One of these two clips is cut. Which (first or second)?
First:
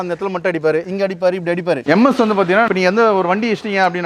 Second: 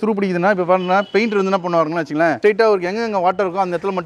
first